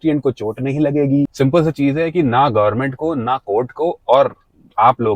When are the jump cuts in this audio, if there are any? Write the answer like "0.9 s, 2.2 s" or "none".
1.3 s